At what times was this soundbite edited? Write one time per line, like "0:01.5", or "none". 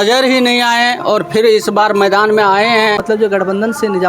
0:03.0